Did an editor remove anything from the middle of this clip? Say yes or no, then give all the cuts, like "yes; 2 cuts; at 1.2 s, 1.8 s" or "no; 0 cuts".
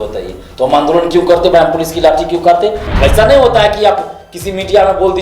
yes; 1 cut; at 2.8 s